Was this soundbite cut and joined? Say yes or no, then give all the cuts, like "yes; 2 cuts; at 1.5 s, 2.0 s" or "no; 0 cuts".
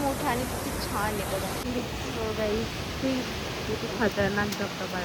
yes; 1 cut; at 1.6 s